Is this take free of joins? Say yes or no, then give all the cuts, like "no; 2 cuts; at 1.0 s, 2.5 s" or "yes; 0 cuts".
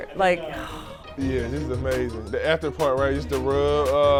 yes; 0 cuts